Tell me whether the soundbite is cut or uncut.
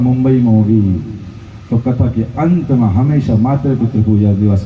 uncut